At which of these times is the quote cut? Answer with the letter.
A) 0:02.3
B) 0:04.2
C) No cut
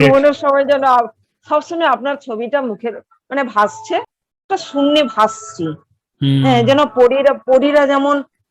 B